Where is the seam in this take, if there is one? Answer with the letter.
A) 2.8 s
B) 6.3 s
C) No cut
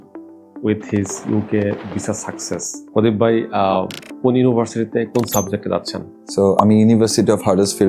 A